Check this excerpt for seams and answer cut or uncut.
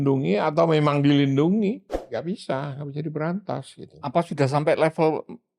cut